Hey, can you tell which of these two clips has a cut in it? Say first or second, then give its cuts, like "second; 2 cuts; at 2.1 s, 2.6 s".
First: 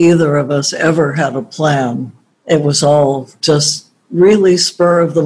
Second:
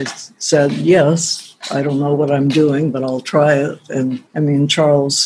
first; 1 cut; at 2.3 s